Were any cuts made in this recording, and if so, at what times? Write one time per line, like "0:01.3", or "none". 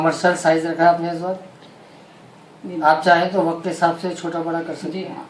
none